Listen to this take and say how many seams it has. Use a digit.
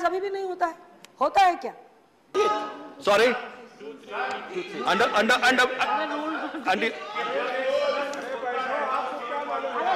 1